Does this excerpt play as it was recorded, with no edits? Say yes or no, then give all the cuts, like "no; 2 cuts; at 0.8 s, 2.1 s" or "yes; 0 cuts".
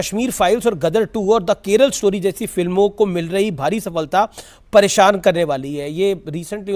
yes; 0 cuts